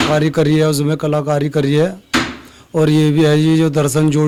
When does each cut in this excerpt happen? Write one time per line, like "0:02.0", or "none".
none